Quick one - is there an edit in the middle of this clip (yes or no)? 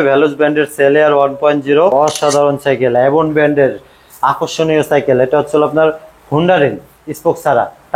yes